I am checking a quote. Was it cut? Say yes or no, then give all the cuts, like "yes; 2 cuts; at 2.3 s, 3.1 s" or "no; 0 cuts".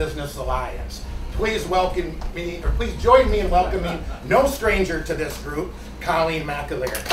no; 0 cuts